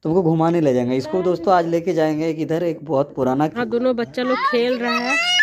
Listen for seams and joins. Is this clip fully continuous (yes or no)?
no